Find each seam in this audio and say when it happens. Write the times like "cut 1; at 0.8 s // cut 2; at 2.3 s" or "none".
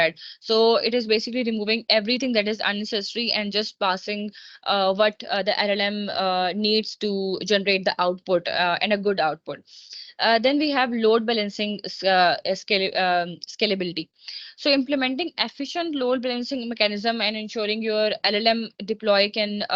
none